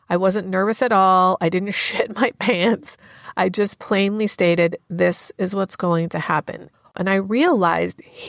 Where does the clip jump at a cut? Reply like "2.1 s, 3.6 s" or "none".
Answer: 6.9 s